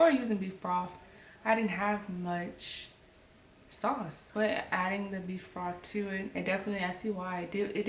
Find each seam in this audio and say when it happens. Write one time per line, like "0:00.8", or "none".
0:04.2
0:06.3